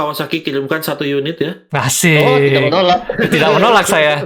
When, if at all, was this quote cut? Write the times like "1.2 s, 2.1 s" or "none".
none